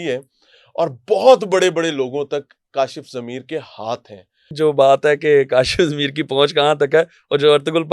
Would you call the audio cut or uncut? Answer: cut